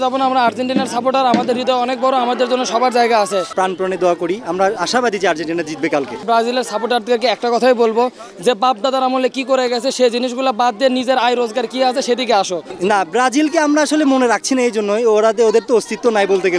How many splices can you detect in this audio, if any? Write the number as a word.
three